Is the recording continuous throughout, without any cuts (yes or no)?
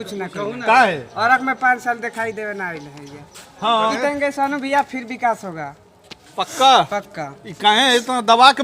no